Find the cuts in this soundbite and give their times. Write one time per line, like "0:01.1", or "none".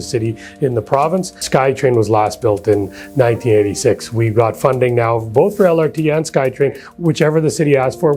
0:01.4